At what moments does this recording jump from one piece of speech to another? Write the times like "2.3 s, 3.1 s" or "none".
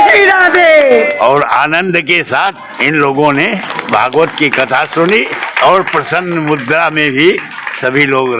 1.1 s, 2.7 s, 3.7 s, 5.4 s